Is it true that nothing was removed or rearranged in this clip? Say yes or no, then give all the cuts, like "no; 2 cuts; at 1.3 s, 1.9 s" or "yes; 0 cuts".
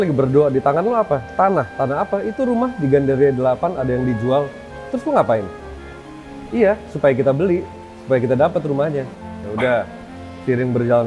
no; 1 cut; at 9.1 s